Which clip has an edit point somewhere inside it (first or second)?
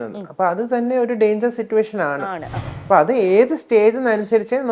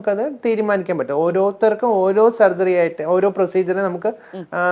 first